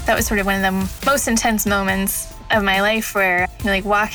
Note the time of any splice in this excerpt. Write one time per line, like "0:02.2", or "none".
0:00.9